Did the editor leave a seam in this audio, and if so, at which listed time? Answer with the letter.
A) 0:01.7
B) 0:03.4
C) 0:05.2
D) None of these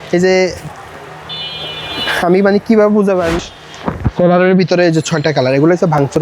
B